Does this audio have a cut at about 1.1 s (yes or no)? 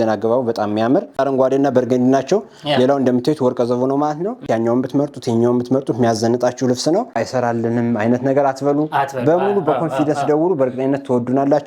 yes